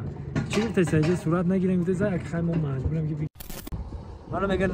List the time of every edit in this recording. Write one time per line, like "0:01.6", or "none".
0:03.5